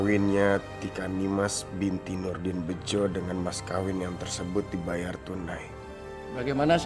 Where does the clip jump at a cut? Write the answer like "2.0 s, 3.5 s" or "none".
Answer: none